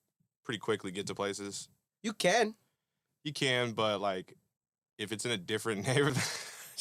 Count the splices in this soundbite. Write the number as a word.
zero